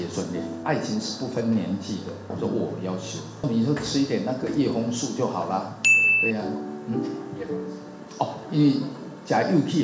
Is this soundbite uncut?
yes; 0 cuts

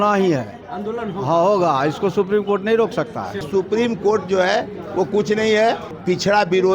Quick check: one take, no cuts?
no; 2 cuts; at 3.5 s, 5.9 s

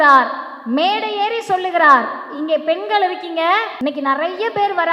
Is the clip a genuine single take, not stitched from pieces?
no; 1 cut; at 3.7 s

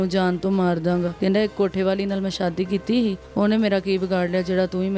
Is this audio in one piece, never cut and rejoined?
no; 2 cuts; at 1.1 s, 3.2 s

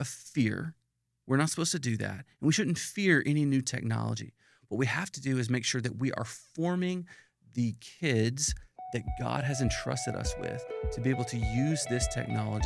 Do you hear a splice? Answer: no; 0 cuts

